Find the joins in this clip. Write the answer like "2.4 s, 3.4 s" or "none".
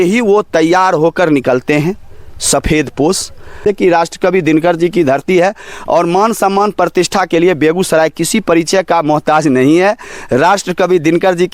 3.6 s